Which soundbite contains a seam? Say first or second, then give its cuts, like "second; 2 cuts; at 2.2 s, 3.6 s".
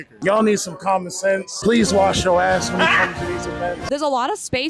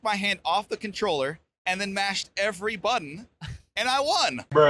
first; 2 cuts; at 1.5 s, 3.8 s